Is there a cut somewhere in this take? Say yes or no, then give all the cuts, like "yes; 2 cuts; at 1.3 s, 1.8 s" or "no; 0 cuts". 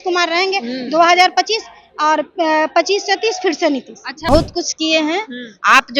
yes; 1 cut; at 4.3 s